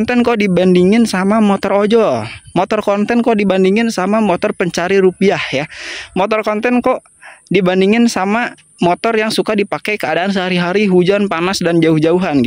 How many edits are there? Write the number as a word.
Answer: zero